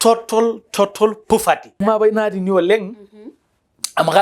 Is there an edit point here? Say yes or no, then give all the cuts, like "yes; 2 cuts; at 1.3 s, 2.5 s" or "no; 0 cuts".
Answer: yes; 1 cut; at 1.8 s